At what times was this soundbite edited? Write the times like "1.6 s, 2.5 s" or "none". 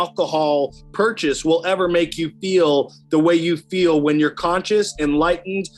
none